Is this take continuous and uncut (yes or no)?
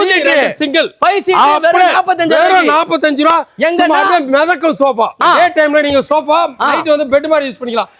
no